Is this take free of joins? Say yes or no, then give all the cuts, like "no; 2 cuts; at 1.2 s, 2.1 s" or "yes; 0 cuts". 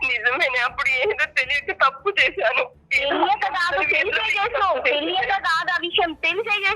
yes; 0 cuts